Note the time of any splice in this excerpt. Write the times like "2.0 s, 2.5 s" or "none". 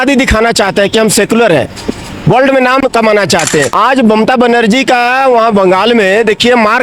3.7 s